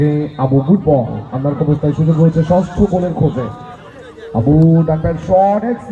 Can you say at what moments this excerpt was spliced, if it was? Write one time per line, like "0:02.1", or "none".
none